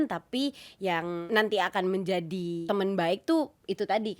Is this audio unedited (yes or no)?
no